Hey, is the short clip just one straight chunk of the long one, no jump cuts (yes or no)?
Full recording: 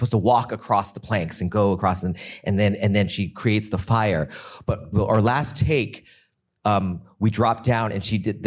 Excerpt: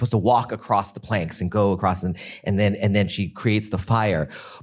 yes